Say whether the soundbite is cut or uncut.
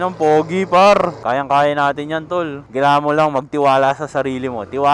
cut